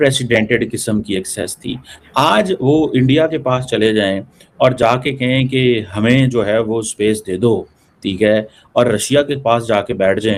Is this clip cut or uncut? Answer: uncut